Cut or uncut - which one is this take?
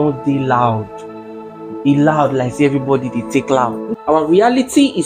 cut